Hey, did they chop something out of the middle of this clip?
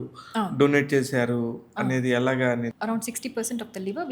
yes; 1 cut; at 2.8 s

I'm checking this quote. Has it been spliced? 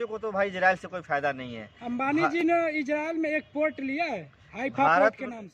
no; 0 cuts

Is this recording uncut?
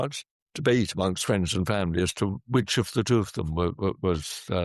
yes; 0 cuts

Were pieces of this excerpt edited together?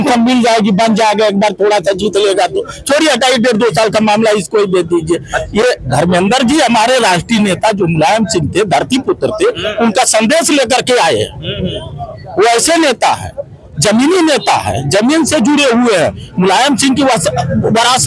no; 0 cuts

